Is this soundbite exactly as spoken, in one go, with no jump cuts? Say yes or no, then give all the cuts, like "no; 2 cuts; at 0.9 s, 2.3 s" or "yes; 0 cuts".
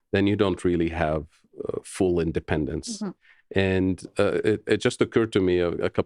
yes; 0 cuts